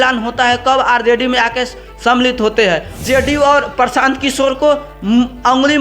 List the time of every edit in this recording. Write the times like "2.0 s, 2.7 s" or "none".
2.9 s